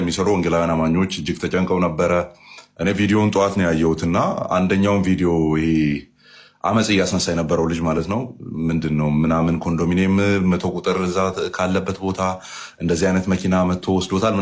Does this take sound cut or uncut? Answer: uncut